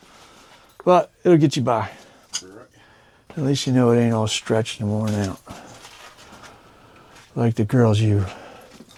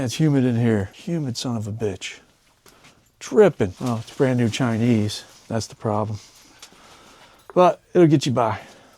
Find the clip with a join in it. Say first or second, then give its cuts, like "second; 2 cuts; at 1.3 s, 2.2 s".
second; 2 cuts; at 1.0 s, 3.8 s